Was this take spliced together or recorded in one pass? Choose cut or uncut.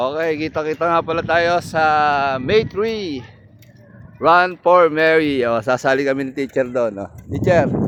uncut